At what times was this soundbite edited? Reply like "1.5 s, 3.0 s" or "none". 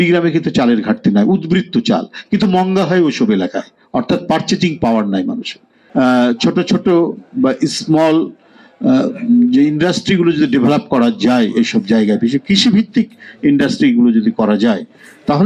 5.7 s